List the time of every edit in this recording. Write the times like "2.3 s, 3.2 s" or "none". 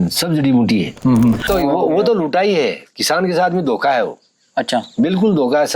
1.5 s

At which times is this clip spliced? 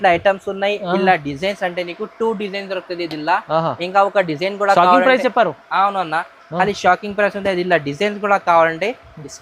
none

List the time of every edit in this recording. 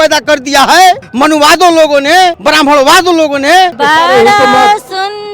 1.1 s, 2.4 s, 3.7 s

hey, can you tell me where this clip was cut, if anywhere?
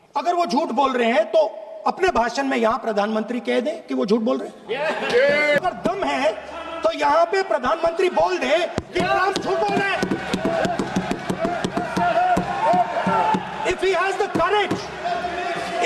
5.6 s

